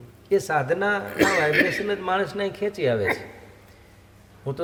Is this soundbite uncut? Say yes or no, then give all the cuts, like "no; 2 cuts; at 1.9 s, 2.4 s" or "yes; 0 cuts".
yes; 0 cuts